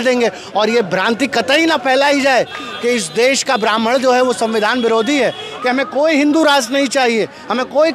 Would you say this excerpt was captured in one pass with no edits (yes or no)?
no